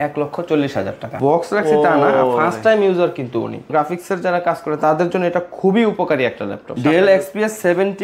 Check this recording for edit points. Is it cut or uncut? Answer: cut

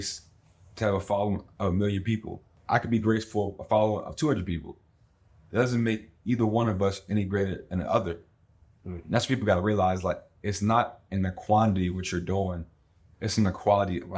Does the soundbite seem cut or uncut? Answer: cut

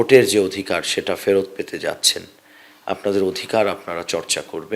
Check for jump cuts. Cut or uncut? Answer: uncut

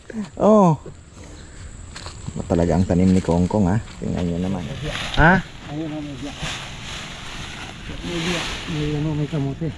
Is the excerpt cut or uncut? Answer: cut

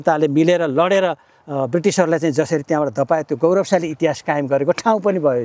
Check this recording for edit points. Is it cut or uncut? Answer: uncut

